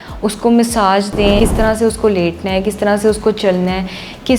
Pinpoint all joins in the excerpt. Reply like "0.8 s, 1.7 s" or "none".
1.4 s